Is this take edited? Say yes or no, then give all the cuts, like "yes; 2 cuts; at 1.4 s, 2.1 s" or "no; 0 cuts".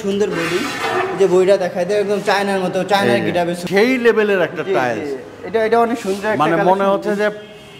yes; 1 cut; at 3.6 s